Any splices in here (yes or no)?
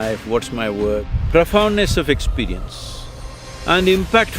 yes